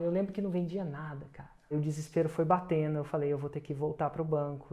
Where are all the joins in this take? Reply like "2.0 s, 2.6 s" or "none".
1.7 s